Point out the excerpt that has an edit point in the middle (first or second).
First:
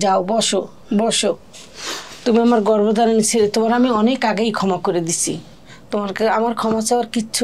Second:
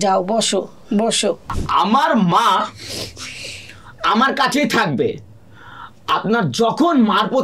second